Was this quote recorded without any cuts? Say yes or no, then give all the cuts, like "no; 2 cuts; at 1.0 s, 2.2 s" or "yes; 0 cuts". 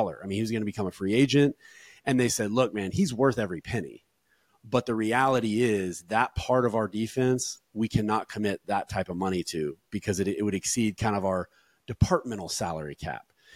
yes; 0 cuts